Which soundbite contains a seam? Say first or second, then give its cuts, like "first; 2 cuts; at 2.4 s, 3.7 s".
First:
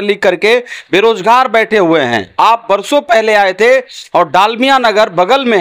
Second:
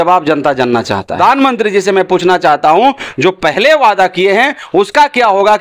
second; 1 cut; at 1.2 s